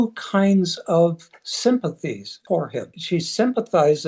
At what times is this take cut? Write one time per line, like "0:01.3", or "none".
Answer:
0:02.3
0:03.0